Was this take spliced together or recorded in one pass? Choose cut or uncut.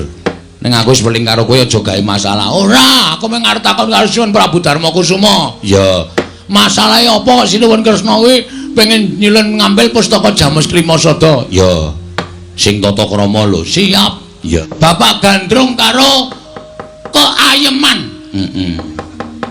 cut